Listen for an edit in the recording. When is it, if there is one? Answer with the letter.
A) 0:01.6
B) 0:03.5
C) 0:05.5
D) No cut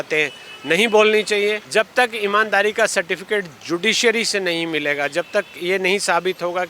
A